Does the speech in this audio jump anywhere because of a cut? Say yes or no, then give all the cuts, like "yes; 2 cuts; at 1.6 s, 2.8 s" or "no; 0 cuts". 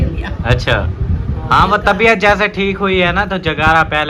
no; 0 cuts